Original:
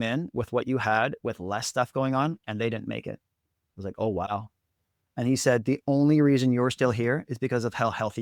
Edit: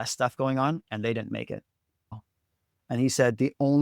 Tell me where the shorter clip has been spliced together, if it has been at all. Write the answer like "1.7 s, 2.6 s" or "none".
2.2 s